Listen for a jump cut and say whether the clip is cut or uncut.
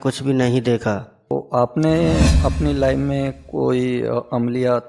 cut